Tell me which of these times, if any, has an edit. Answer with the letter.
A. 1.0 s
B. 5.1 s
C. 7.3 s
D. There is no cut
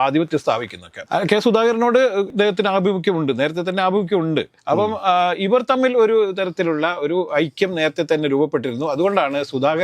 D